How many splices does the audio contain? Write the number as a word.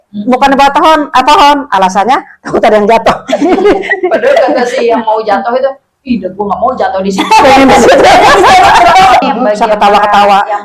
two